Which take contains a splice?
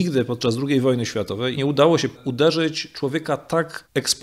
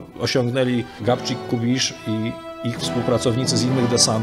first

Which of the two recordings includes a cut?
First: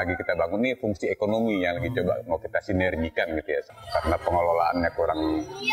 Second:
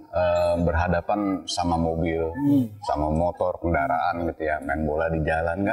first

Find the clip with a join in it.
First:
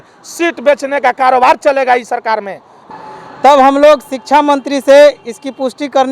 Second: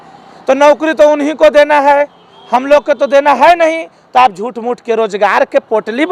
first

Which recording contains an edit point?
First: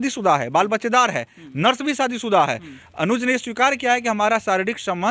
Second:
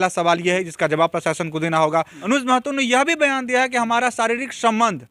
second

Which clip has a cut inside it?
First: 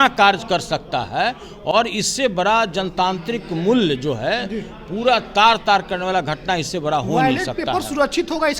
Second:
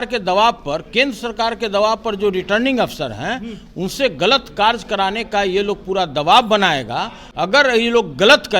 second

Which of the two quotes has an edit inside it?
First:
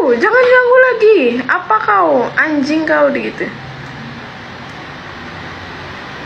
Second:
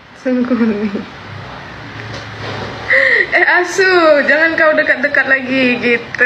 first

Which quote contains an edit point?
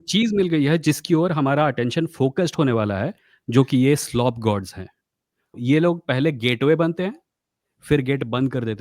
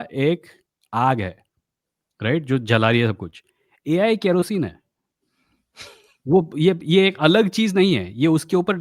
first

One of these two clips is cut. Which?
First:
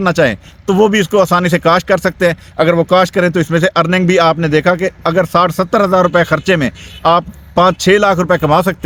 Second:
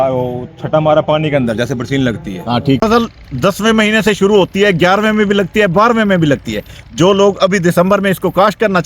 second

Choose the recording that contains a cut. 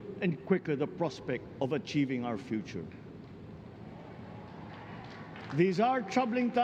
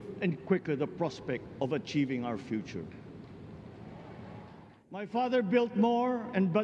second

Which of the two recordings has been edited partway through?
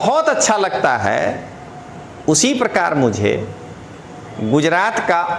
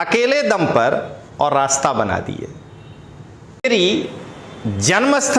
second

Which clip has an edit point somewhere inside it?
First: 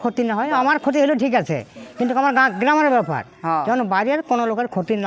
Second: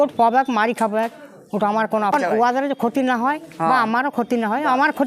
second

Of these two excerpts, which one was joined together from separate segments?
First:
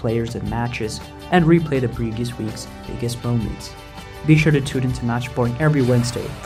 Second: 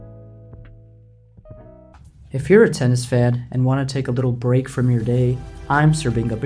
second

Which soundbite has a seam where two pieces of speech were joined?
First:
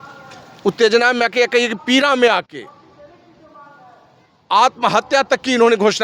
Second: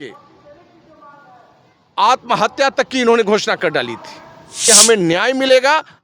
second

